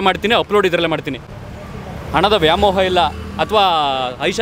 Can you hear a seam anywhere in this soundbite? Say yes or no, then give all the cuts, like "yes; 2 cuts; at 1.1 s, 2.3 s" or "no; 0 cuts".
no; 0 cuts